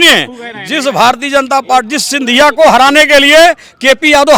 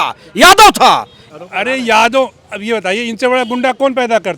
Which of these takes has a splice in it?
second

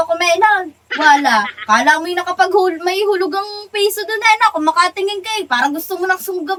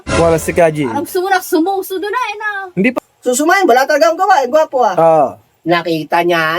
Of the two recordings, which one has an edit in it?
second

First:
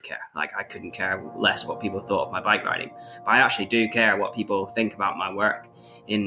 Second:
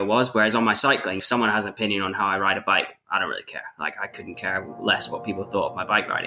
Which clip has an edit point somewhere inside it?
second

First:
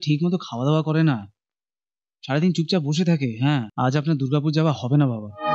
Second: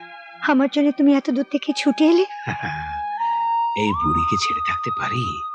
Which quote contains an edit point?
first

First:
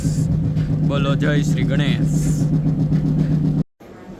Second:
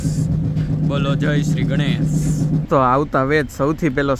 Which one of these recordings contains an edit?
second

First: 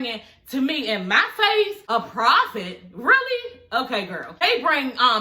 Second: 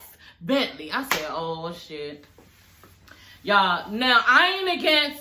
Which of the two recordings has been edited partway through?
first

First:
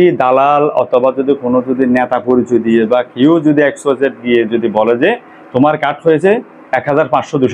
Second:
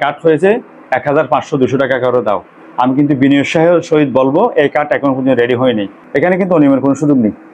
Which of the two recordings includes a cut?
second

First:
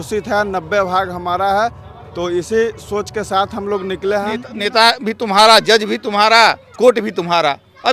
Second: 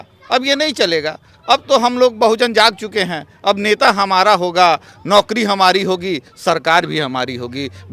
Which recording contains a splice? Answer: first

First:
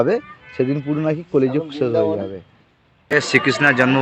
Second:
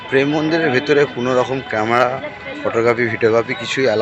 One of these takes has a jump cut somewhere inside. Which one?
first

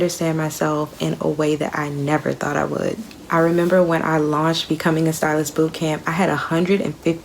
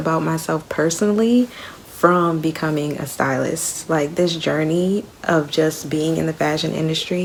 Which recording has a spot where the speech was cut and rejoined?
first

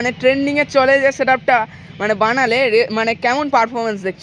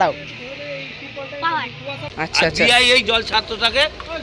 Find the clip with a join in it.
second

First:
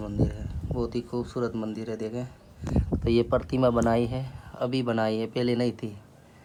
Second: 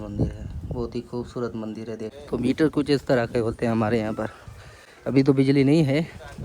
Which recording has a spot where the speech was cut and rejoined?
second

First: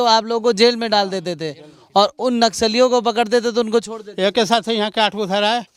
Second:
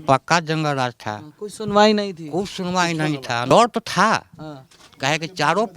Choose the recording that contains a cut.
second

